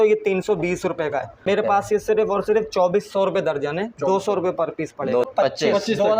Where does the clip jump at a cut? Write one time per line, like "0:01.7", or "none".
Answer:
0:01.3
0:05.3